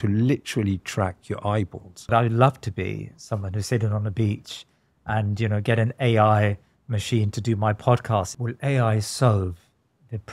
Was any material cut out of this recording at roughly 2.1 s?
yes; 2 cuts; at 2.1 s, 8.3 s

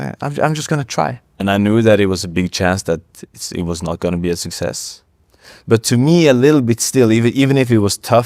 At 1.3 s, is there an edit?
no; 0 cuts

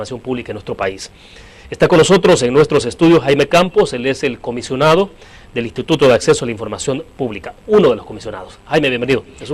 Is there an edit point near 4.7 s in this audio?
yes; 1 cut; at 4.7 s

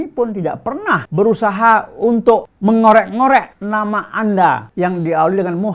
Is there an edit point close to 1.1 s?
yes; 4 cuts; at 1.1 s, 2.5 s, 3.6 s, 4.7 s

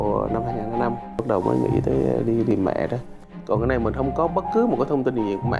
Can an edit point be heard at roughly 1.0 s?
no; 1 cut; at 3.1 s

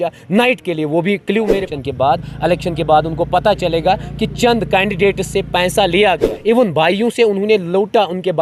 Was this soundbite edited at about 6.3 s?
yes; 2 cuts; at 1.7 s, 6.3 s

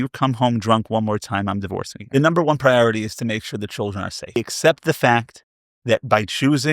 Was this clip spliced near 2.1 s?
yes; 2 cuts; at 2.1 s, 4.4 s

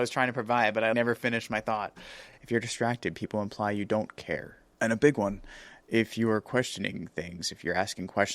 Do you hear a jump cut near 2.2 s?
yes; 2 cuts; at 0.9 s, 2.2 s

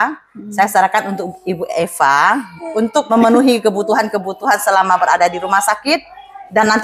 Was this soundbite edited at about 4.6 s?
no; 1 cut; at 3.1 s

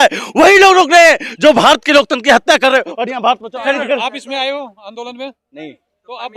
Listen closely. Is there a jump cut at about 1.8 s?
no; 1 cut; at 3.6 s

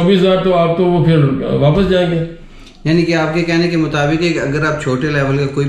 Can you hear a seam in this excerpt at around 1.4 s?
no; 0 cuts

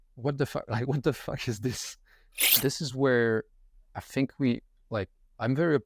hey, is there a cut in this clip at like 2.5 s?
yes; 1 cut; at 2.5 s

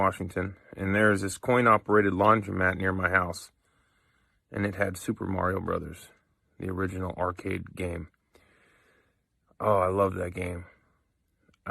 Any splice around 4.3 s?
no; 2 cuts; at 6.4 s, 7.6 s

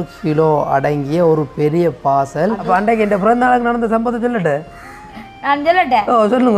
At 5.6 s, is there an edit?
no; 1 cut; at 2.6 s

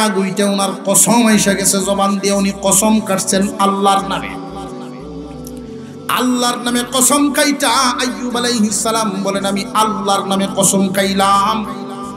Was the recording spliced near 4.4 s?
yes; 2 cuts; at 4.4 s, 6.1 s

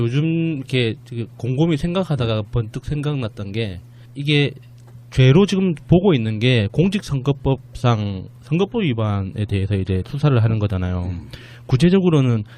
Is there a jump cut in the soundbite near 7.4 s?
yes; 1 cut; at 7.4 s

